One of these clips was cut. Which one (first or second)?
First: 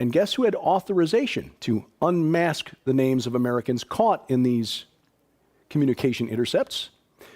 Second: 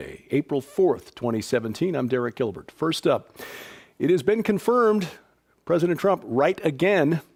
first